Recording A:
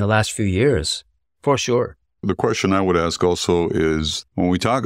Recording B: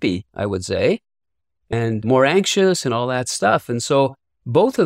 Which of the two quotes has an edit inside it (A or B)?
A